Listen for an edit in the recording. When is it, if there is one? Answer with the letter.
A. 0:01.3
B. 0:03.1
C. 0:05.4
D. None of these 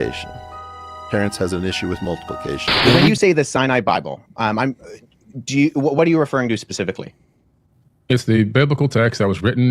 B